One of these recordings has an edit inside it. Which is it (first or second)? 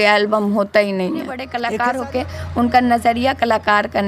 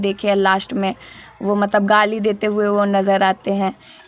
first